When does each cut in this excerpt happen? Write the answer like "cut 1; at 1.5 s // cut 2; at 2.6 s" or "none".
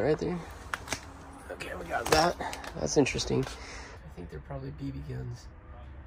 none